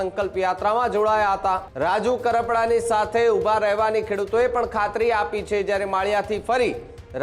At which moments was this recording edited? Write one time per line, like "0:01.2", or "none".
0:01.7